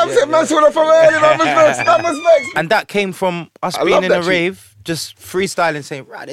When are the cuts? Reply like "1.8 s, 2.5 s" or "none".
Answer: 2.5 s